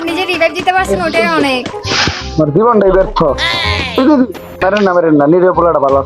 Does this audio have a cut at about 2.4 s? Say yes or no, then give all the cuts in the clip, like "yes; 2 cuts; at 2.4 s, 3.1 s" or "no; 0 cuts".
no; 1 cut; at 4.5 s